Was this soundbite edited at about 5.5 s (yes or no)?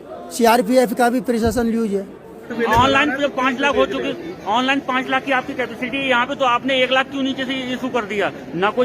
no